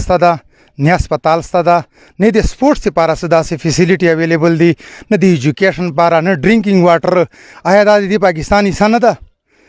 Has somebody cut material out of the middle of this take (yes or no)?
no